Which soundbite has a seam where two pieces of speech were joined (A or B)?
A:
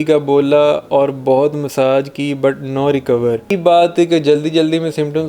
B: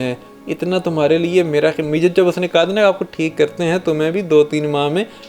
A